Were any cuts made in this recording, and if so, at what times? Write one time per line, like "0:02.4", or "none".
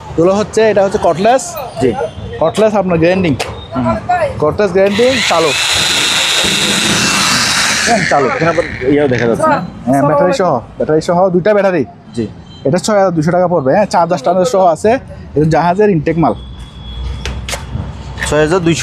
none